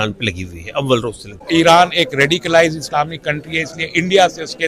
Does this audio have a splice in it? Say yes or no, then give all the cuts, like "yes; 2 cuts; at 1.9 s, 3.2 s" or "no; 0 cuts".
yes; 1 cut; at 1.3 s